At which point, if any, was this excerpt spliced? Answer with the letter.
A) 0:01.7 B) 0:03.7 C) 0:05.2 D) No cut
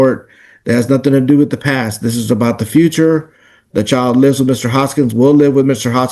D